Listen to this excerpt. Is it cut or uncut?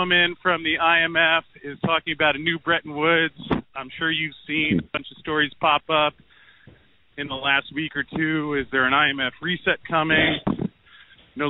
uncut